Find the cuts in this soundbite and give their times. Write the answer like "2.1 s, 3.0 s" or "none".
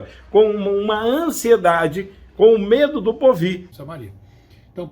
3.7 s